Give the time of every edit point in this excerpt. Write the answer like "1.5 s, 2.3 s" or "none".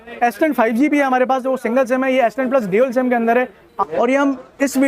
3.7 s